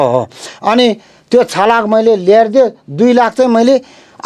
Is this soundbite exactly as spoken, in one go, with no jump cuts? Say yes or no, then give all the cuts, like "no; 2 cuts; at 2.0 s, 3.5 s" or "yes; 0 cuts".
yes; 0 cuts